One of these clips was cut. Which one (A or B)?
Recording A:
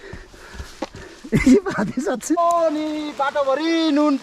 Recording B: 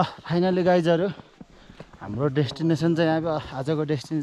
A